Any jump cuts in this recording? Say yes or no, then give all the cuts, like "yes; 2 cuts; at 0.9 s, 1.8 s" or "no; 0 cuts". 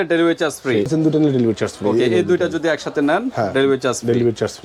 yes; 1 cut; at 0.9 s